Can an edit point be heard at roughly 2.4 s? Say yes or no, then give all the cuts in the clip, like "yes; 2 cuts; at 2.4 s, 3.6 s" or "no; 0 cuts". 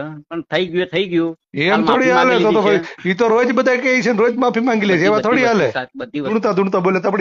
no; 1 cut; at 6.3 s